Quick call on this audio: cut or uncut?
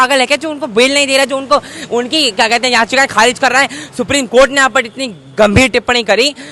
uncut